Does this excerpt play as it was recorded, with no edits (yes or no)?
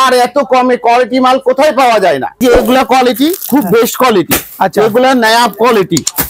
no